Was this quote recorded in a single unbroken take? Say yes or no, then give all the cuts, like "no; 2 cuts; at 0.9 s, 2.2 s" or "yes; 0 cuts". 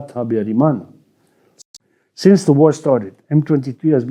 no; 1 cut; at 1.6 s